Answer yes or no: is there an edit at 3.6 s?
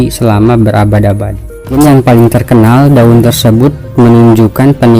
no